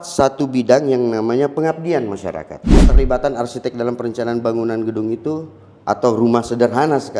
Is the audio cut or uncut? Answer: cut